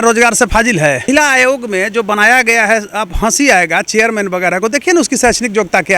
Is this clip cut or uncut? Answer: cut